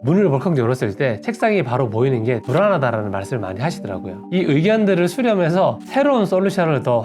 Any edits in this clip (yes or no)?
no